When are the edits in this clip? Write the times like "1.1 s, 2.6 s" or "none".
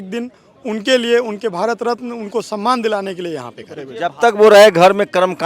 3.9 s